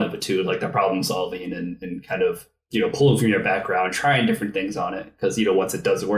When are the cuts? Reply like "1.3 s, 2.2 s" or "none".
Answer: none